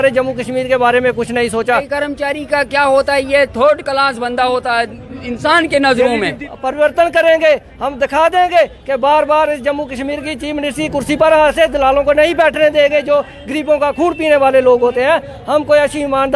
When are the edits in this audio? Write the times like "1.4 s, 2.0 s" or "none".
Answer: 1.9 s, 6.5 s